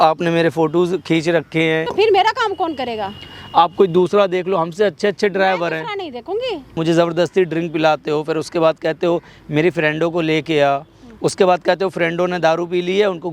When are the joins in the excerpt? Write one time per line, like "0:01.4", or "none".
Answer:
0:01.9
0:06.7